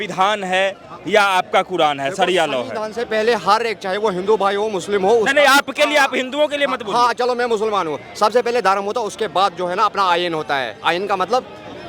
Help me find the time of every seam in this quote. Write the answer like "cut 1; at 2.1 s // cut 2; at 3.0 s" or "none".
none